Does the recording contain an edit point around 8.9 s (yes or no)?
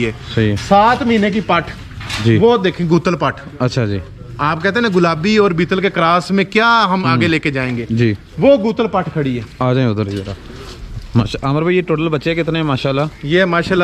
no